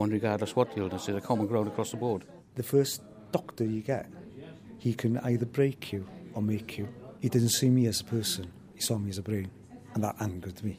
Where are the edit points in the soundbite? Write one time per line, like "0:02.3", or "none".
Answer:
0:02.4
0:07.0

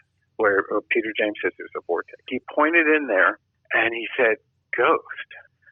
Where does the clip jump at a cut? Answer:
0:02.4

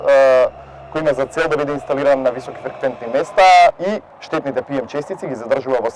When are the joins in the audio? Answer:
0:03.8

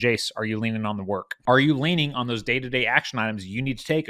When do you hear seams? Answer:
0:01.4

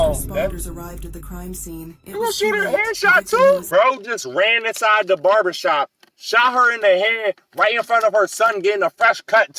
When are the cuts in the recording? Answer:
0:03.6

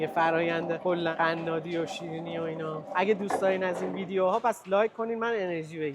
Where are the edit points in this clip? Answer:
0:01.0
0:02.8

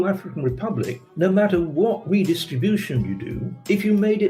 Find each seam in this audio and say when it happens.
none

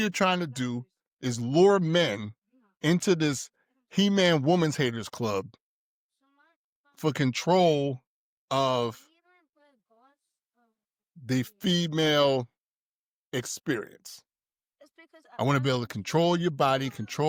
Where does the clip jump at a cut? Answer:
none

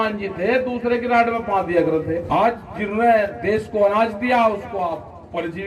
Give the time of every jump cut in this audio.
0:02.2

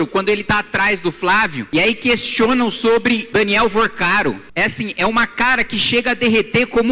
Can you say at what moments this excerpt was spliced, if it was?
0:01.6
0:03.2
0:04.4

